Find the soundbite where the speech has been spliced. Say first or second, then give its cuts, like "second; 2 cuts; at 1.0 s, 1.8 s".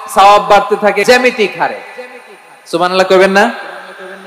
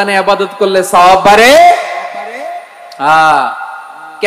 first; 1 cut; at 1.0 s